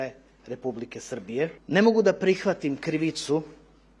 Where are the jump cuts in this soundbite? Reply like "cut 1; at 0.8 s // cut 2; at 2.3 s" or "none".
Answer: cut 1; at 1.6 s